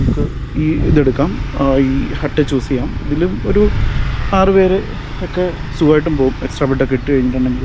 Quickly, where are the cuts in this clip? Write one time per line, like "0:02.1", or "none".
none